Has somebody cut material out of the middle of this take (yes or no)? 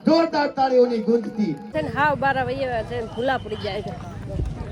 yes